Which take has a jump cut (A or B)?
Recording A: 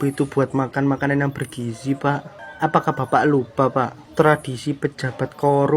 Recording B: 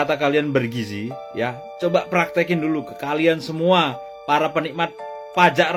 A